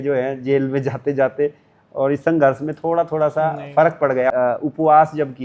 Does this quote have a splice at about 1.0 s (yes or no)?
no